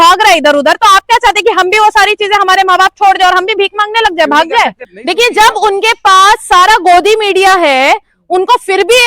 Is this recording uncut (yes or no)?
no